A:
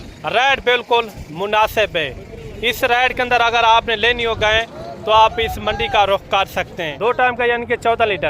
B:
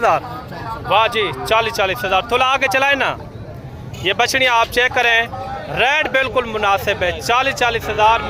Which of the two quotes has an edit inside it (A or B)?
A